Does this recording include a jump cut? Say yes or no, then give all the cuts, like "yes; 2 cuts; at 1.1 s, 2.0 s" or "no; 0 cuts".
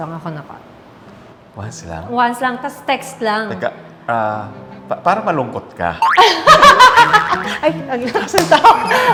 no; 0 cuts